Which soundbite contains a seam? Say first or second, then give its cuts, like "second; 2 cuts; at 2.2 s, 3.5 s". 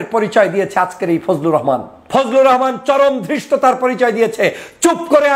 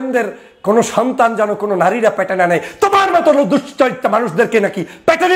first; 1 cut; at 2.1 s